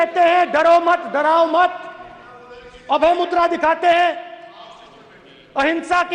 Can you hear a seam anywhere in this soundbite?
no; 0 cuts

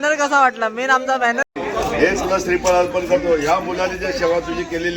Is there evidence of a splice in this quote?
yes; 1 cut; at 1.4 s

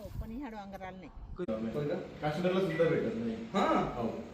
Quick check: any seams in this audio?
yes; 1 cut; at 1.5 s

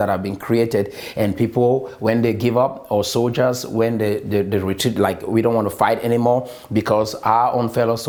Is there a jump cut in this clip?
no; 0 cuts

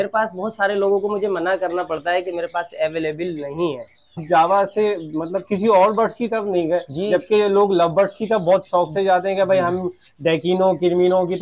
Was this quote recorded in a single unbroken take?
no; 1 cut; at 4.2 s

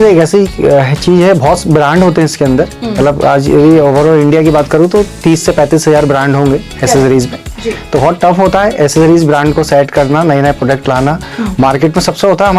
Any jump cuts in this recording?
no; 0 cuts

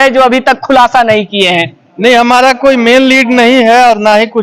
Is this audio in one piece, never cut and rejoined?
yes; 0 cuts

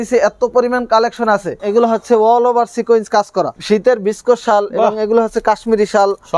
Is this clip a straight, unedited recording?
no; 2 cuts; at 1.6 s, 3.5 s

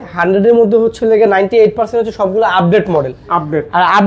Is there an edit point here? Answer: no; 0 cuts

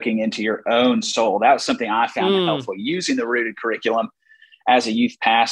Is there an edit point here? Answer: no; 0 cuts

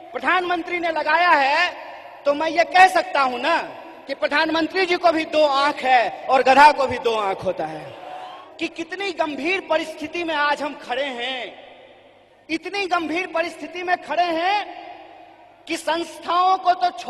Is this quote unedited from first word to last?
no; 1 cut; at 8.4 s

